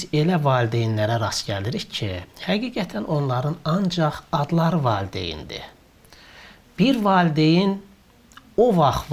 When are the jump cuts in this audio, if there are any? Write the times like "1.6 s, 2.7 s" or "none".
none